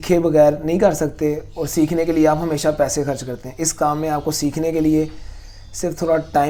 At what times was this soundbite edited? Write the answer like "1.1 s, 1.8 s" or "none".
none